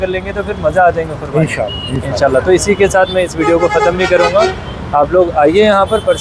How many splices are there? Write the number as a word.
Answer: zero